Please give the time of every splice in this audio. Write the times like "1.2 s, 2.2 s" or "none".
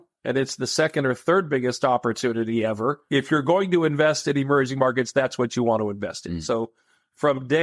none